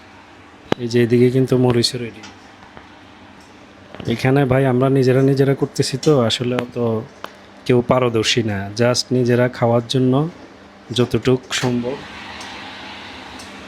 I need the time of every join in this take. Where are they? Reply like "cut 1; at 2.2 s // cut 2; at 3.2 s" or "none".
none

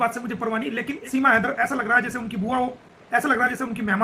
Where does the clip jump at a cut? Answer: cut 1; at 1.0 s

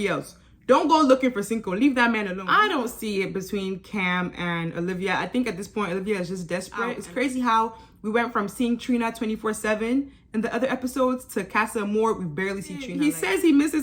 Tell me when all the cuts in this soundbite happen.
cut 1; at 2.4 s // cut 2; at 7.0 s // cut 3; at 12.9 s

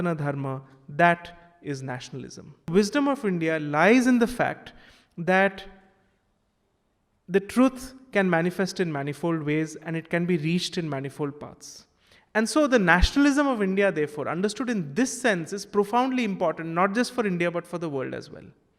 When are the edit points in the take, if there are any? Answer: cut 1; at 2.7 s

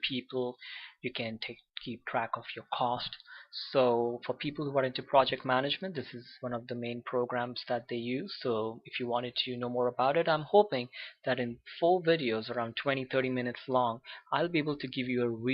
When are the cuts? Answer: none

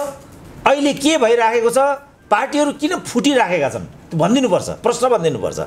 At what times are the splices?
none

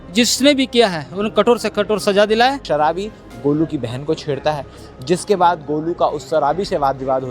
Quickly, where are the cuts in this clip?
cut 1; at 2.6 s

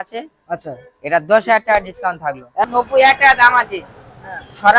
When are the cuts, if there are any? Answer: cut 1; at 2.6 s

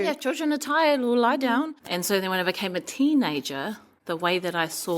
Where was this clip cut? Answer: cut 1; at 1.8 s // cut 2; at 3.9 s

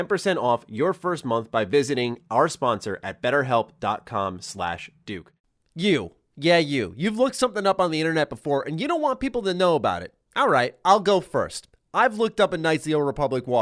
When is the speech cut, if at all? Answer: cut 1; at 5.4 s

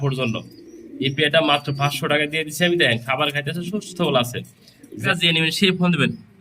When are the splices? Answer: cut 1; at 5.0 s

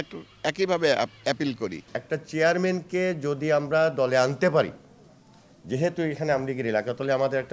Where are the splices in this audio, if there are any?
cut 1; at 1.8 s

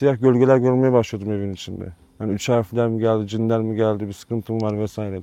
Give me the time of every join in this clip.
none

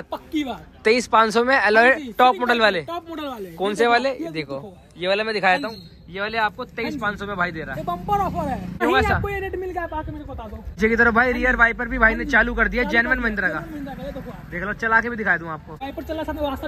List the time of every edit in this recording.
cut 1; at 8.8 s // cut 2; at 10.8 s // cut 3; at 15.7 s

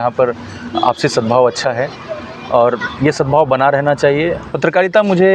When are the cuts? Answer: cut 1; at 4.4 s

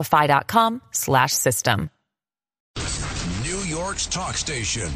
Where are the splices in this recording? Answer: cut 1; at 2.6 s

